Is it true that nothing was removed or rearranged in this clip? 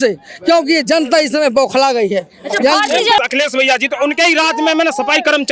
no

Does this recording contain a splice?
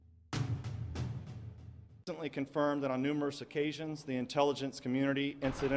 no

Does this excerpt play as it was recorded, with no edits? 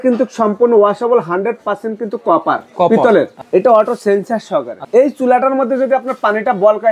no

